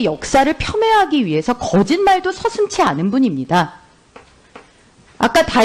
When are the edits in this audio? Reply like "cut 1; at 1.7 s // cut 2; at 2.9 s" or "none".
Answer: none